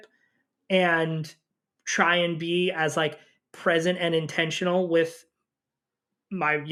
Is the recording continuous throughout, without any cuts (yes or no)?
yes